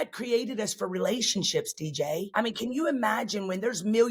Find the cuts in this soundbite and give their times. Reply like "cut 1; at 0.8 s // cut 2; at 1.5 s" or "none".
cut 1; at 2.3 s